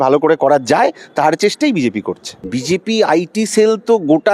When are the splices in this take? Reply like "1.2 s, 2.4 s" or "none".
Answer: 2.4 s